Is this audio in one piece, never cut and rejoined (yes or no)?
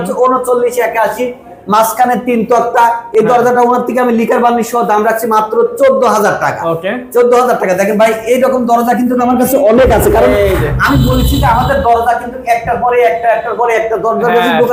yes